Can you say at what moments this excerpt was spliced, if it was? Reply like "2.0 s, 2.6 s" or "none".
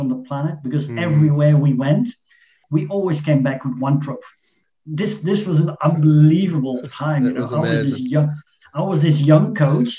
2.6 s, 4.6 s